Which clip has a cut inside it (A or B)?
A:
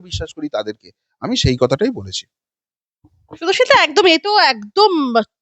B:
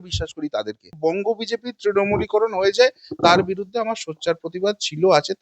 B